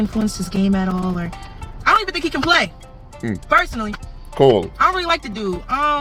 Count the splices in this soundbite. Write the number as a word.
zero